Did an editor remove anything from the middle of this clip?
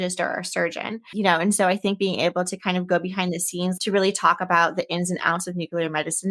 yes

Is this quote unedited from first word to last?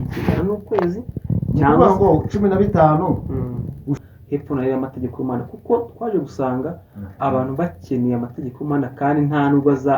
no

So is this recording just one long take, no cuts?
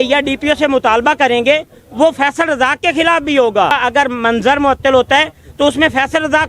no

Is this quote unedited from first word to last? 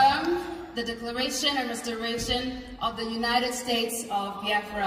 yes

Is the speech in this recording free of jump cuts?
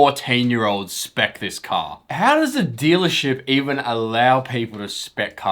no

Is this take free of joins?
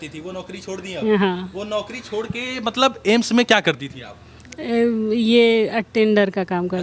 yes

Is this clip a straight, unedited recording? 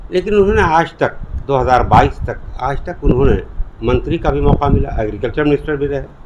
yes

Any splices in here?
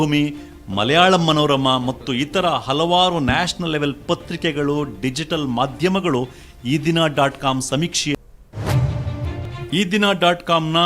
yes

